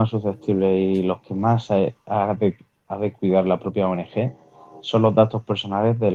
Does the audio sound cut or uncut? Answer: uncut